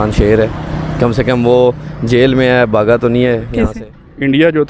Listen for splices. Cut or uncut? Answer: cut